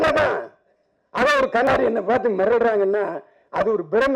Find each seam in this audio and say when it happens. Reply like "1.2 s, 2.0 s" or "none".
1.7 s